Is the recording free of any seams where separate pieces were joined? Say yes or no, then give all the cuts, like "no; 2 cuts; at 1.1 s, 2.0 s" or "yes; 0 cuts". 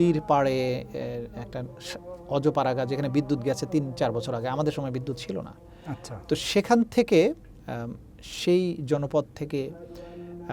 yes; 0 cuts